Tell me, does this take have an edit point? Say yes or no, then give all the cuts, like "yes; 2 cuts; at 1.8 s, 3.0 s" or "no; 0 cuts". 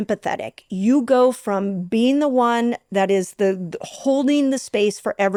no; 0 cuts